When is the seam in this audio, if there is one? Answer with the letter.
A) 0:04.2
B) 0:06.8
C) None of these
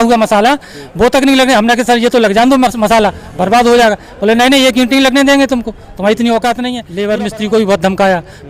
B